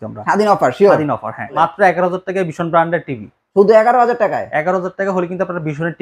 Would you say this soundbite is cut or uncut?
cut